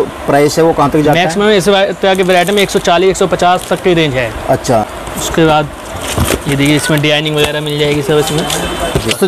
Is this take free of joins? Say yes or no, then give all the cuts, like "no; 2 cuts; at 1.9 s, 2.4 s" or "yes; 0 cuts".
yes; 0 cuts